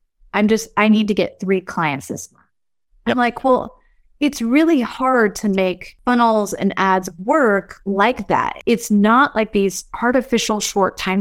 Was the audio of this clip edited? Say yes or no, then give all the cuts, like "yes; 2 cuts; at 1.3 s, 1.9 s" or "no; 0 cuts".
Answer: yes; 2 cuts; at 5.9 s, 8.6 s